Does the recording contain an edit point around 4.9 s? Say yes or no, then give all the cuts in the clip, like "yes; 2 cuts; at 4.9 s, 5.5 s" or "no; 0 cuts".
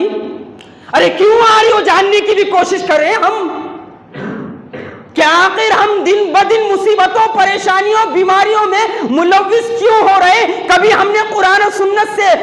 no; 0 cuts